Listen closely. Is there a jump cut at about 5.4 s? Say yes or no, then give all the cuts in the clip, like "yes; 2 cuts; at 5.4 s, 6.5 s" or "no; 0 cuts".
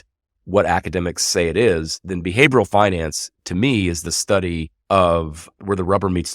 yes; 2 cuts; at 4.7 s, 5.4 s